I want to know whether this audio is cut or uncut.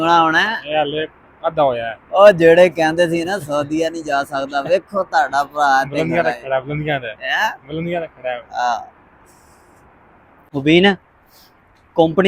cut